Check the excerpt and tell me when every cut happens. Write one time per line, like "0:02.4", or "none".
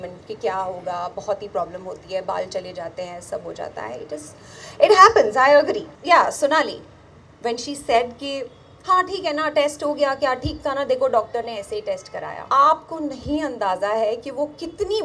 0:05.9
0:12.3